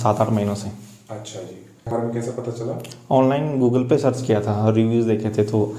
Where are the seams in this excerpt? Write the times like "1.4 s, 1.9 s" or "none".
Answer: 1.9 s

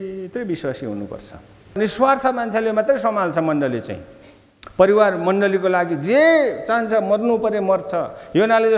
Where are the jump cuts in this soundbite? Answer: 1.8 s

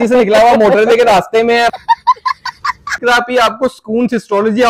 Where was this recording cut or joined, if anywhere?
1.7 s, 3.0 s

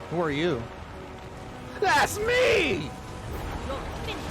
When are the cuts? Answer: 3.2 s

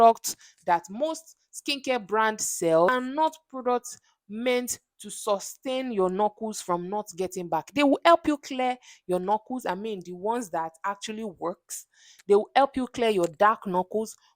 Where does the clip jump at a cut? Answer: 2.9 s

